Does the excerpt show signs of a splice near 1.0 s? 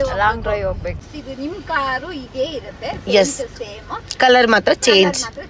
yes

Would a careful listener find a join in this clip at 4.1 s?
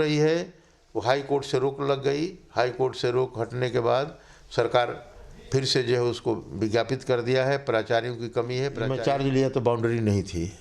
no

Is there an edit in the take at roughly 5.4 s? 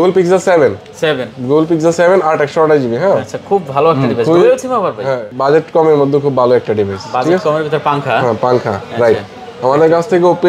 yes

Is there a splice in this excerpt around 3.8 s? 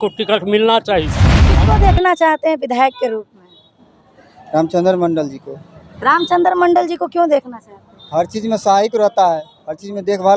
no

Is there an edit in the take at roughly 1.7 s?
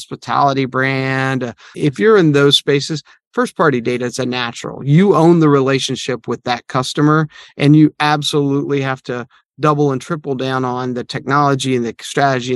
yes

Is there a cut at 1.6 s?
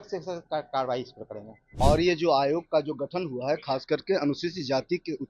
yes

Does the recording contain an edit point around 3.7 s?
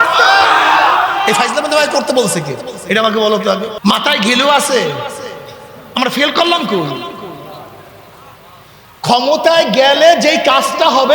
yes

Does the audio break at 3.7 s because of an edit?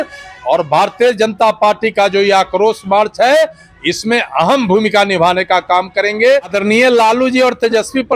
no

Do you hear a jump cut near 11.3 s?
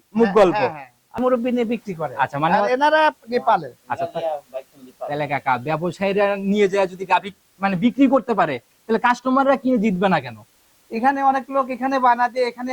no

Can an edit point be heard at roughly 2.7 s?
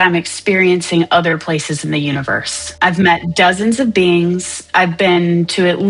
yes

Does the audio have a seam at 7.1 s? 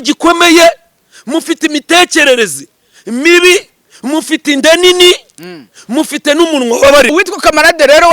yes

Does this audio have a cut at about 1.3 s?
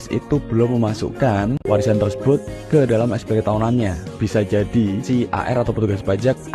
yes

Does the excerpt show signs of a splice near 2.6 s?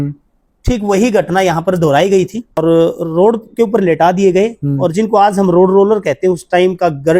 yes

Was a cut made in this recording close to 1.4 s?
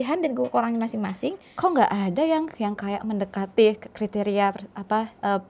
yes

